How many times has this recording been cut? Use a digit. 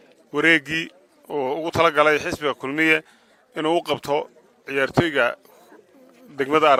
0